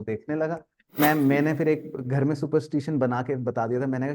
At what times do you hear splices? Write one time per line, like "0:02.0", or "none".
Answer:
0:01.0